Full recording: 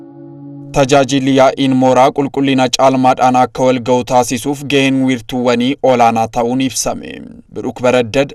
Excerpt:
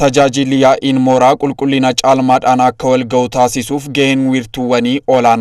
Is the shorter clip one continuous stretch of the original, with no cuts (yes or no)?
yes